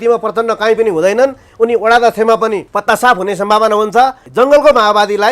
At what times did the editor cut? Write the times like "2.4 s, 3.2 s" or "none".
2.7 s, 4.2 s